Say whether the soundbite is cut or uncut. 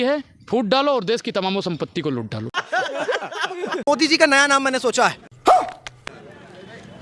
cut